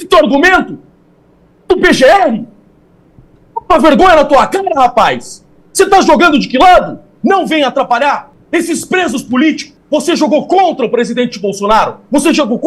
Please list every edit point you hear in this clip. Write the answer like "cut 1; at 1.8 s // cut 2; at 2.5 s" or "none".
cut 1; at 7.1 s // cut 2; at 8.3 s // cut 3; at 9.7 s